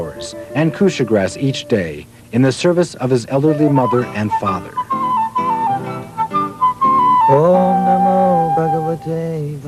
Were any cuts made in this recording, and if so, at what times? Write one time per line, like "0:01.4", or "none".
none